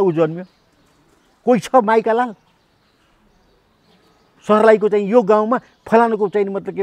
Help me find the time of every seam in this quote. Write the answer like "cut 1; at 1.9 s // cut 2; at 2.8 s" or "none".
none

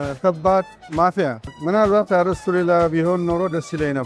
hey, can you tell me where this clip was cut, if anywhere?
cut 1; at 1.5 s

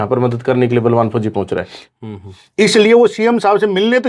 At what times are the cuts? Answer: cut 1; at 1.8 s

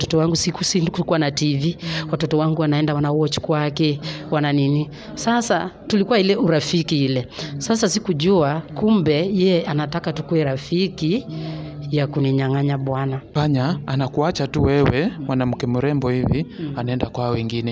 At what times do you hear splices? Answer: cut 1; at 13.4 s

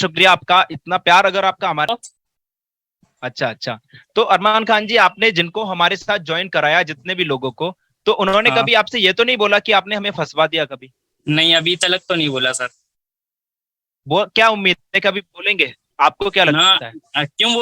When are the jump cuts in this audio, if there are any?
cut 1; at 1.9 s

